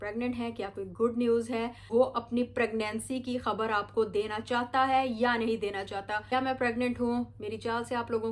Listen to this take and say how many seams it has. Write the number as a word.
two